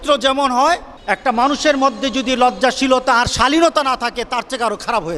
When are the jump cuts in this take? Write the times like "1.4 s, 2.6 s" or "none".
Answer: 0.9 s